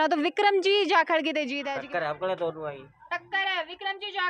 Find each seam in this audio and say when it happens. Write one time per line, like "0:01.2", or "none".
0:01.6

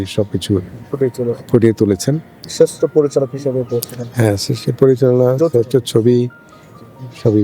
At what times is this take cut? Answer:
0:02.4

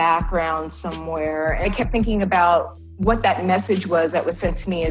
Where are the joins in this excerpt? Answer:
0:01.7

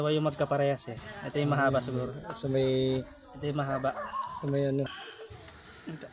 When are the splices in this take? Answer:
0:05.0

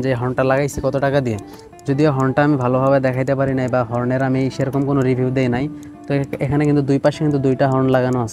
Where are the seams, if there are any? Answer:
none

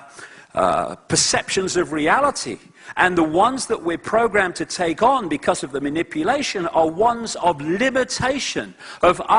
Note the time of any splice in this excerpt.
0:04.9

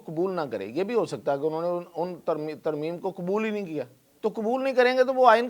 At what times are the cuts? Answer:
0:04.0

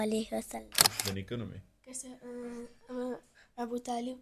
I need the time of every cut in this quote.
0:00.9

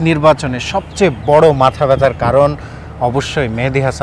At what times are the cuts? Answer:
none

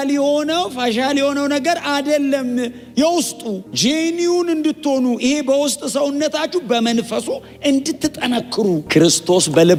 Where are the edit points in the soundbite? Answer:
none

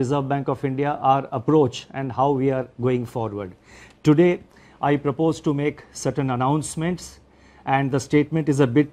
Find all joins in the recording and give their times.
none

